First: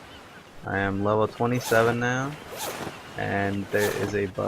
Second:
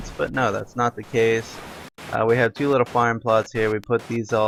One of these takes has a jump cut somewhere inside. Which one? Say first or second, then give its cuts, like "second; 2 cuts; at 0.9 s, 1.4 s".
first; 1 cut; at 2.1 s